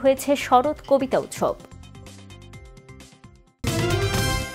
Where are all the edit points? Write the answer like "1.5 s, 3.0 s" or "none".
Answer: 3.6 s